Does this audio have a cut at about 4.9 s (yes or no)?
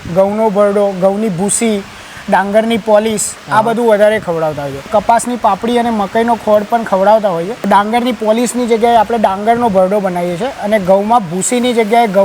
yes